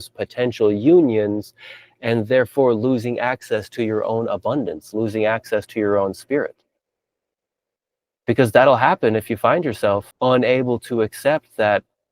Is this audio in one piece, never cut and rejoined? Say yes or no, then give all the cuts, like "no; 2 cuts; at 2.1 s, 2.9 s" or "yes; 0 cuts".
no; 1 cut; at 10.1 s